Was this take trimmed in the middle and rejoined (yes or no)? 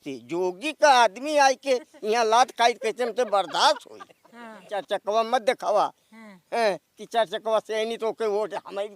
yes